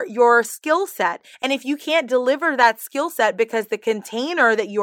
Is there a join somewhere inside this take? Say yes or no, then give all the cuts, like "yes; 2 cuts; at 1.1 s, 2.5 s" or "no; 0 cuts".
no; 0 cuts